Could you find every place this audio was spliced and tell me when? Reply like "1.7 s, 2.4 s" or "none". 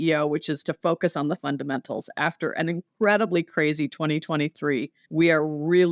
2.9 s, 5.0 s